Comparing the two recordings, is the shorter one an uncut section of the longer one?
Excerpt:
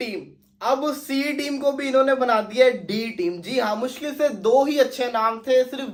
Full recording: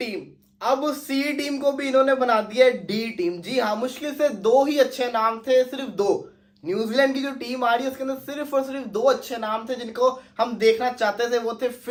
yes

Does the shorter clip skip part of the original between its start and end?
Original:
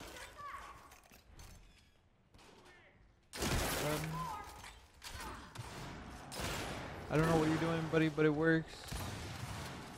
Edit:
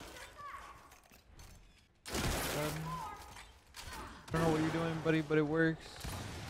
yes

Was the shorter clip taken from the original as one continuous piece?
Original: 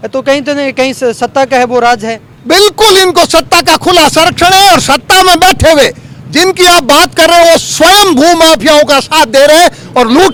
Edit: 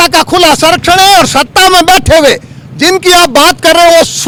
yes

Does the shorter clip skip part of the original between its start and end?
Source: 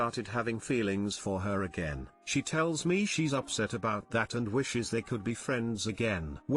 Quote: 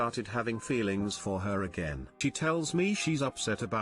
yes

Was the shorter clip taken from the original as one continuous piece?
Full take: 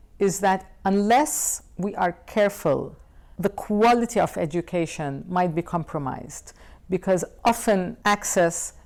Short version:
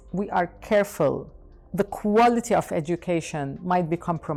yes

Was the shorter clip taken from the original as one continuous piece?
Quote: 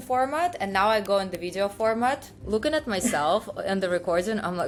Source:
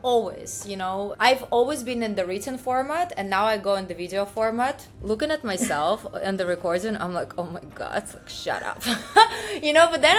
yes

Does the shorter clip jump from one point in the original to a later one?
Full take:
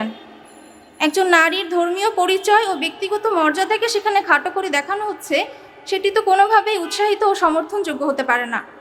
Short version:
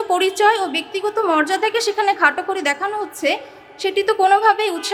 no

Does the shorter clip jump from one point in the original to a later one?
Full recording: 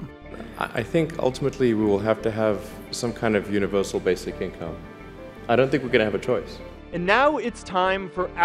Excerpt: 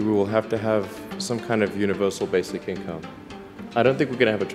no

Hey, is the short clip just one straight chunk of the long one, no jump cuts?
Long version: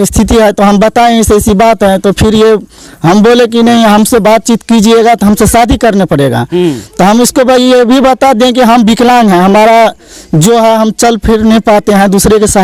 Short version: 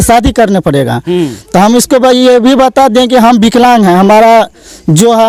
yes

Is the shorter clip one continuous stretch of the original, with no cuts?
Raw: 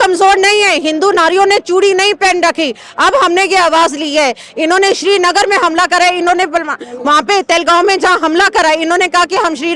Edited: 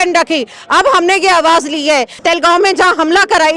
no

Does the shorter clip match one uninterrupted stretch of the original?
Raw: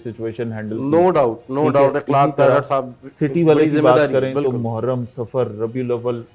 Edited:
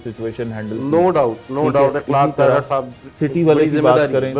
yes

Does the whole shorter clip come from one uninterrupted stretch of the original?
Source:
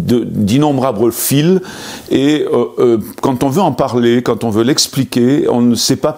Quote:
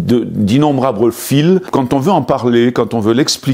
no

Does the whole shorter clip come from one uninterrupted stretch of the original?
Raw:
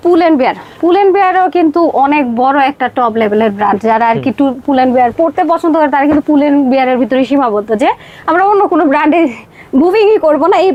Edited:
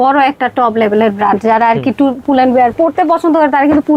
yes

